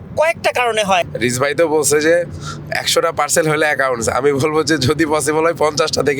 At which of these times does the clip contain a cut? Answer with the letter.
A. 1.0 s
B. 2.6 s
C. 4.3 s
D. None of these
A